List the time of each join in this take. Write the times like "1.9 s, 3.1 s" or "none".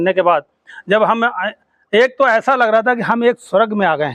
none